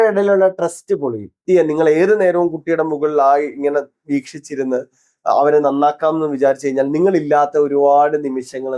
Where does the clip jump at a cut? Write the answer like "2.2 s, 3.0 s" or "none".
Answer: 1.3 s